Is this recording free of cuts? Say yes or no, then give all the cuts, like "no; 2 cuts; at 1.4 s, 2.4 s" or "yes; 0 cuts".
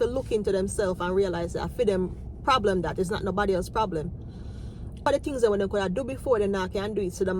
no; 1 cut; at 5.0 s